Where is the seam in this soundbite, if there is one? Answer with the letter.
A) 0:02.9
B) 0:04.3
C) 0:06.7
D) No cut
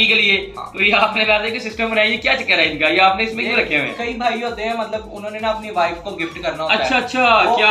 D